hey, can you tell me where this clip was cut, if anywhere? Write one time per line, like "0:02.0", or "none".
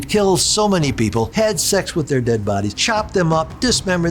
0:01.3
0:02.8